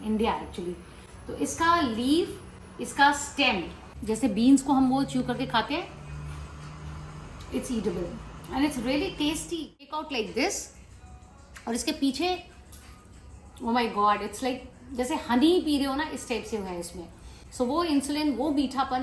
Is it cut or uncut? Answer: cut